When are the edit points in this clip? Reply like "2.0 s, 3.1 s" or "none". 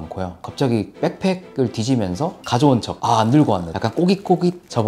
3.7 s